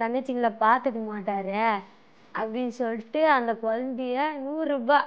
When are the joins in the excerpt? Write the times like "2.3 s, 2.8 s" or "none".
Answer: none